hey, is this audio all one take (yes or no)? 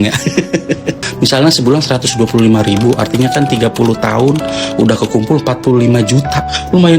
no